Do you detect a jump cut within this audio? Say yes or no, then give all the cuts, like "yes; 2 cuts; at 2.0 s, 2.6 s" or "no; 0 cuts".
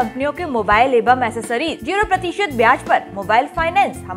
yes; 1 cut; at 1.8 s